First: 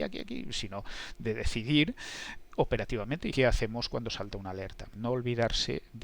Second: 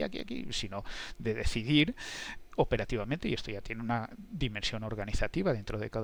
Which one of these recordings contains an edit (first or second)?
first